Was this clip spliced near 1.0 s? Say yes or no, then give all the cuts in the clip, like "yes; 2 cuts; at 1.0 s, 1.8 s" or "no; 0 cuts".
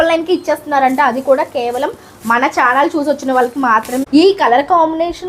no; 1 cut; at 4.0 s